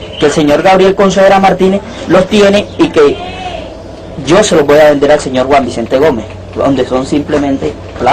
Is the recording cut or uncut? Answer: uncut